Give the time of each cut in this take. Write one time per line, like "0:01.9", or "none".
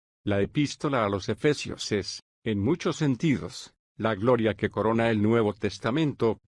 0:02.1